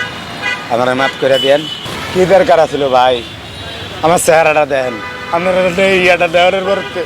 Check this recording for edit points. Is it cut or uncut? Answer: cut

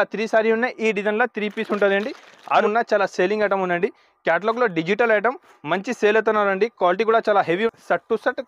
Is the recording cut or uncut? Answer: cut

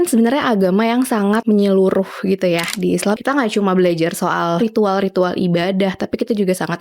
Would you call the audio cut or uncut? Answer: cut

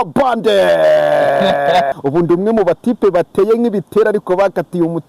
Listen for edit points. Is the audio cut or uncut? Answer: cut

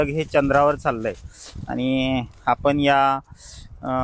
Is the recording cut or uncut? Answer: uncut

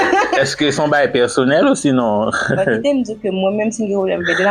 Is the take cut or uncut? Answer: uncut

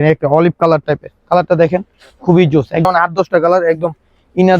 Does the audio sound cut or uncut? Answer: cut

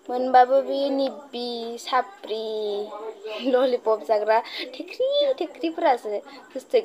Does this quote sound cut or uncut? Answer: uncut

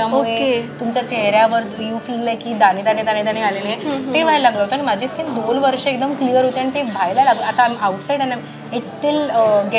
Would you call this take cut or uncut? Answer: uncut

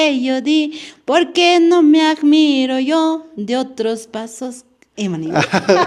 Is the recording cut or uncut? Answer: uncut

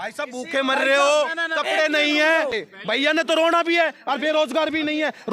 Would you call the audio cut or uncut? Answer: cut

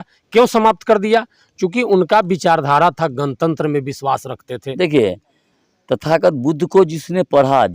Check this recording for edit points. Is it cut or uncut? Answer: cut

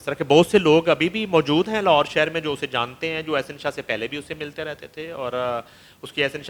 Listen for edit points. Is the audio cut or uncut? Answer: uncut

